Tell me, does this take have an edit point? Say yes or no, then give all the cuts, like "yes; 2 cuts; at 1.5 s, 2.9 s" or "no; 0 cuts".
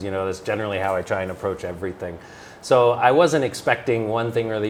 no; 0 cuts